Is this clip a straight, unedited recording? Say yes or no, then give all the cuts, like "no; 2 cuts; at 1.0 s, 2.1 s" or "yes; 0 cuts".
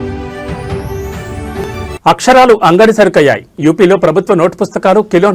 yes; 0 cuts